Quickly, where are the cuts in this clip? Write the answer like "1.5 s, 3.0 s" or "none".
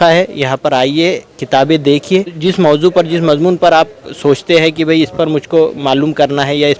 2.4 s